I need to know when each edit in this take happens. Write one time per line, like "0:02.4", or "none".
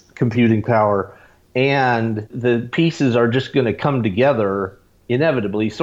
0:02.3